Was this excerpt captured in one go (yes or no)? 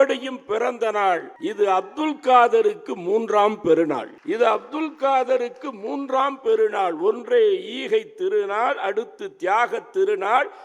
no